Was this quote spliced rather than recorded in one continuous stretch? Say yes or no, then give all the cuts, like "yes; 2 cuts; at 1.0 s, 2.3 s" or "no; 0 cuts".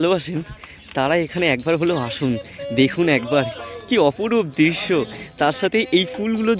no; 0 cuts